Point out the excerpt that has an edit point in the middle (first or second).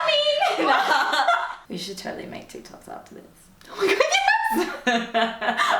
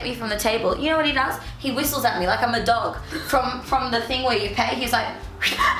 first